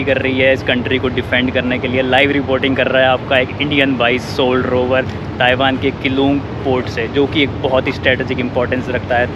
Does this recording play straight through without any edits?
yes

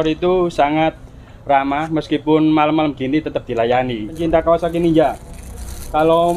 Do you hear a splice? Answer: yes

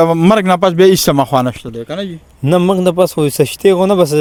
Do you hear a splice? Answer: no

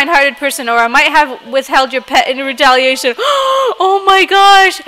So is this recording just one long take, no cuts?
yes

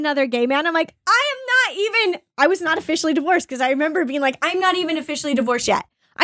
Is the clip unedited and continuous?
yes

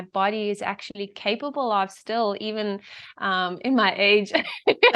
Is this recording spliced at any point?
no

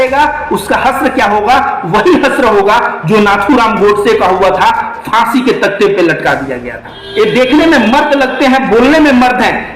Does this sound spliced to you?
yes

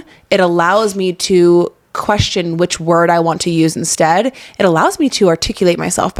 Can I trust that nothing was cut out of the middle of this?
yes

